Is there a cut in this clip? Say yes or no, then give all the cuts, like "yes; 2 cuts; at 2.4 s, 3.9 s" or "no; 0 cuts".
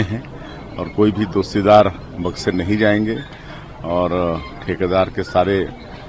no; 0 cuts